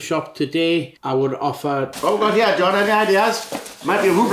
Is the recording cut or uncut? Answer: cut